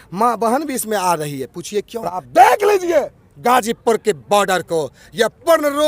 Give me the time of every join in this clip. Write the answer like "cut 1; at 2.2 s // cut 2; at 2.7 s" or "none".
cut 1; at 2.2 s